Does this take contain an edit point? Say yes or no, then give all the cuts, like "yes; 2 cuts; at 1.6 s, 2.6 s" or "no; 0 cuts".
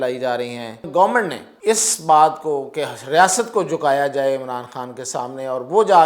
yes; 2 cuts; at 0.9 s, 1.5 s